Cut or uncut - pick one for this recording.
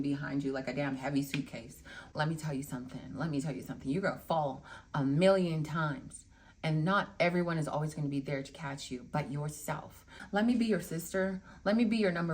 cut